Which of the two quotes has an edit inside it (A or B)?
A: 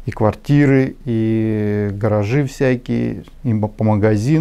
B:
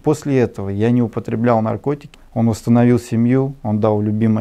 B